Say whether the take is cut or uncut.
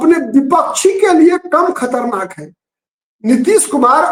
uncut